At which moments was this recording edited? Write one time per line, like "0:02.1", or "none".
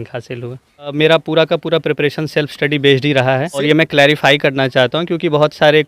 0:00.9
0:03.6